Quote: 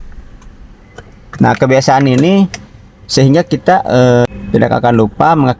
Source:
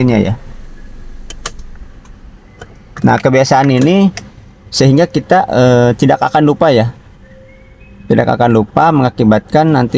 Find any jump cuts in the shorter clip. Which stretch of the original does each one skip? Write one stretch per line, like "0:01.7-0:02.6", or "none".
0:05.9-0:07.9